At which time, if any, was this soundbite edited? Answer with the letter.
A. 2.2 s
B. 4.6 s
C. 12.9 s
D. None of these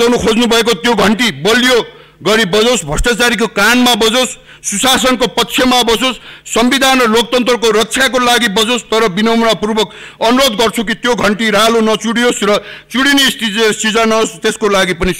D